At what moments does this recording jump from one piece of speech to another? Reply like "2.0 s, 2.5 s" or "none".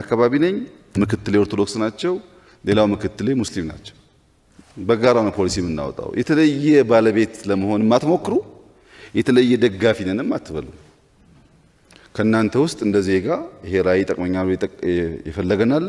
none